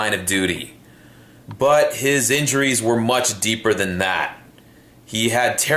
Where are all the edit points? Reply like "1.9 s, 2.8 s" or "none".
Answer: 3.6 s